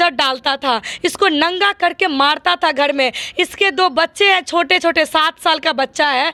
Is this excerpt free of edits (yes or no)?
yes